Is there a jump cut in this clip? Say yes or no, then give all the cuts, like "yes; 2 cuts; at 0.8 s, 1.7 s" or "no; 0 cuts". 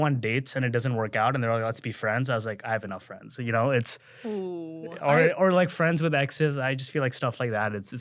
no; 0 cuts